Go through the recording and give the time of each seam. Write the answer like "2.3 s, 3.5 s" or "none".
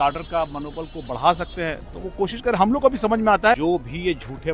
3.6 s